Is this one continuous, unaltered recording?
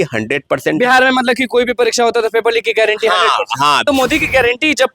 no; 1 cut; at 3.8 s

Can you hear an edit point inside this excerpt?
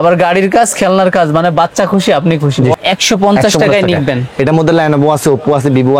yes; 1 cut; at 2.7 s

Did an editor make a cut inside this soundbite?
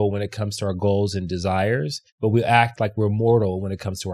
yes; 1 cut; at 2.0 s

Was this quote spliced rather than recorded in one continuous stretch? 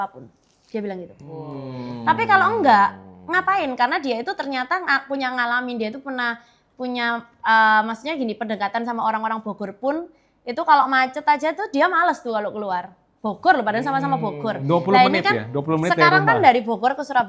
no; 0 cuts

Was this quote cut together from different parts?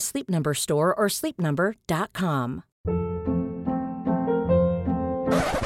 yes; 1 cut; at 2.7 s

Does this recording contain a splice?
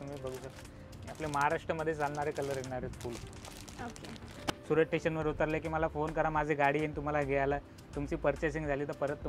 yes; 1 cut; at 4.5 s

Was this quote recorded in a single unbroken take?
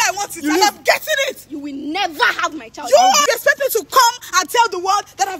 no; 1 cut; at 3.2 s

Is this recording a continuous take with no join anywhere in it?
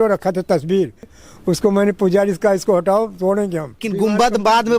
no; 2 cuts; at 1.2 s, 3.9 s

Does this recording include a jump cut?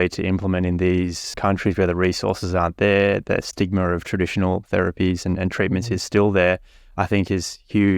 yes; 1 cut; at 1.3 s

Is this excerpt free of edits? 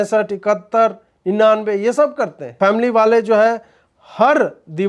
no; 1 cut; at 2.4 s

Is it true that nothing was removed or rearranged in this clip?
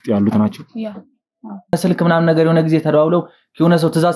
no; 1 cut; at 1.7 s

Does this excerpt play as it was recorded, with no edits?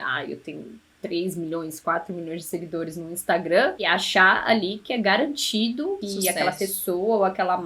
no; 2 cuts; at 3.8 s, 6.1 s

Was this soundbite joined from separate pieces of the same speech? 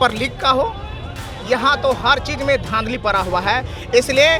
no; 0 cuts

